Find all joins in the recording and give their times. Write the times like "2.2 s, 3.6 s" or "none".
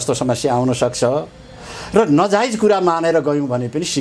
none